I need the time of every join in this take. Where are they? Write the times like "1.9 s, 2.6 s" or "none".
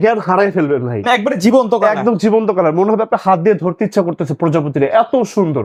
none